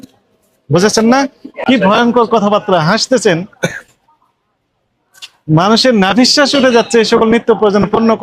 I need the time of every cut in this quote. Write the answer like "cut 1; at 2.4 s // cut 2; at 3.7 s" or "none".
cut 1; at 1.5 s